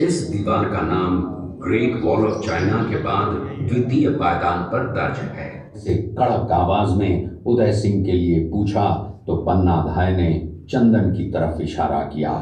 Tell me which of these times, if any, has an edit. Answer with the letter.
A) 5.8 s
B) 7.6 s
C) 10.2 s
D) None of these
A